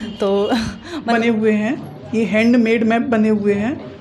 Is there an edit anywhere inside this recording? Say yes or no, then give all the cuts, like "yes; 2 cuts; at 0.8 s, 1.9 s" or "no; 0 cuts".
yes; 1 cut; at 1.1 s